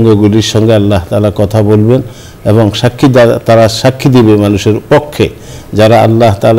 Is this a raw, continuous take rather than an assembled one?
yes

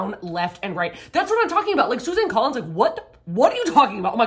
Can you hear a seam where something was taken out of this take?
no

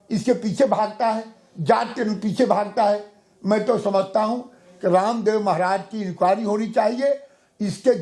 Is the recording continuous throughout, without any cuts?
yes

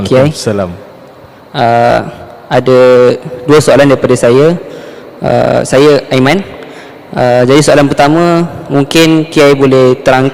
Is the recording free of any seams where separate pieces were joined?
yes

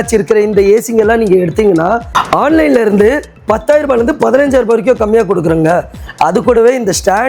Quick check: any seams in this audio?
no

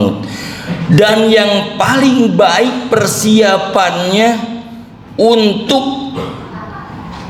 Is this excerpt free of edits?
yes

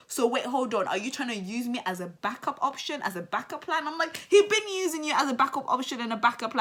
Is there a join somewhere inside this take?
no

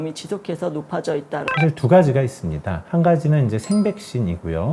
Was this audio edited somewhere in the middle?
yes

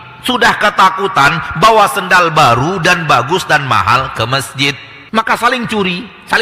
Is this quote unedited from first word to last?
no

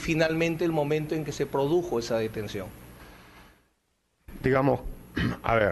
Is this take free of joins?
no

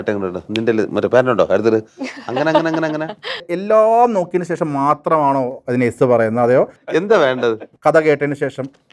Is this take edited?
yes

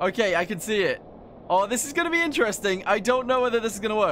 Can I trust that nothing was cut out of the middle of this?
yes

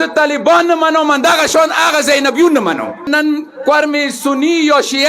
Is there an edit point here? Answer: yes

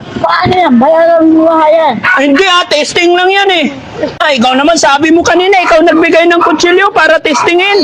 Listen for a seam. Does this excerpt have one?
yes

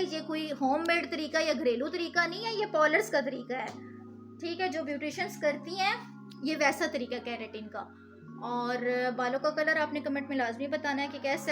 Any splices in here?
no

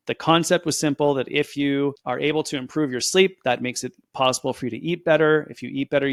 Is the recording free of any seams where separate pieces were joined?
yes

